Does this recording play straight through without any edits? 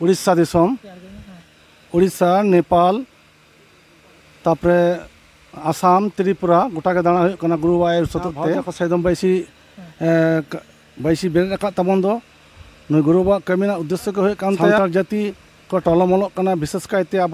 no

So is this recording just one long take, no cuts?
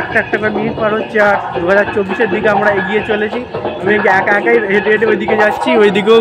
yes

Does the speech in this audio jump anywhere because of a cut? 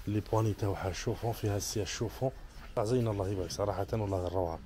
yes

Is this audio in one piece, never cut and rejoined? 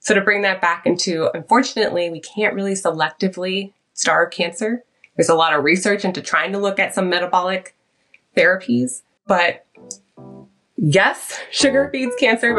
no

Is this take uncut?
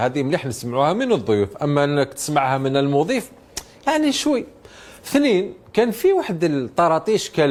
yes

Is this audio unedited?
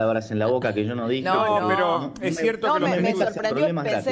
yes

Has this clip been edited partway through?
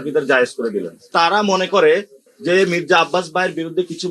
yes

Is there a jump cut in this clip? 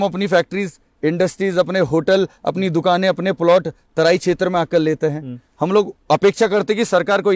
no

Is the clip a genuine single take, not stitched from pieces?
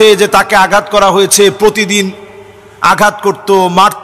yes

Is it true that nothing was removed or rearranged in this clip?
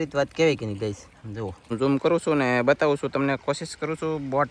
no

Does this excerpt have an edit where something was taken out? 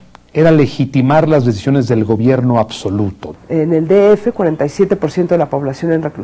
yes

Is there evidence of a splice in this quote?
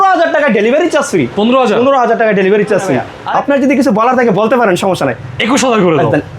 yes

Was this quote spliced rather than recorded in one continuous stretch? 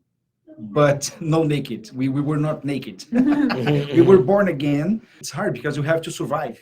yes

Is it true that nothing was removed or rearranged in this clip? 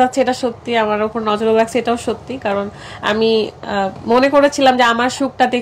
yes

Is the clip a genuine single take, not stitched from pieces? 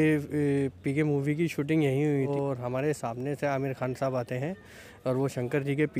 no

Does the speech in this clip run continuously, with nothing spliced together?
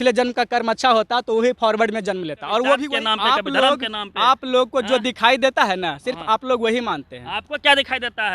no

